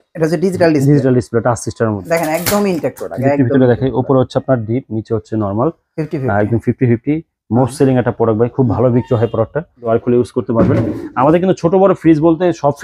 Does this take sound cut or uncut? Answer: cut